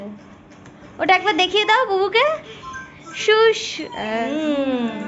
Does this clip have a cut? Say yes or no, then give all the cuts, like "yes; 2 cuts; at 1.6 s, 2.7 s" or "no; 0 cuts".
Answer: yes; 1 cut; at 4.0 s